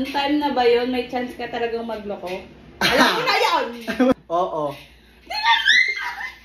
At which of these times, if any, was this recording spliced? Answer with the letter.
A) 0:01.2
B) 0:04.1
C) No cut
B